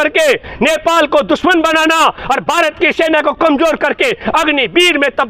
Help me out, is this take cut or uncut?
uncut